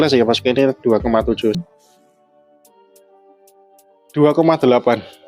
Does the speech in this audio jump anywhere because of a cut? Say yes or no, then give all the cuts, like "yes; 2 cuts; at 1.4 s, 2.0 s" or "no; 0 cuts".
yes; 1 cut; at 1.6 s